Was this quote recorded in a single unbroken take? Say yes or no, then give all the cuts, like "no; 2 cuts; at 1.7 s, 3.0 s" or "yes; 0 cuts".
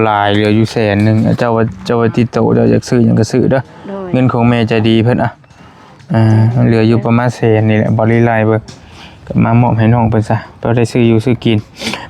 yes; 0 cuts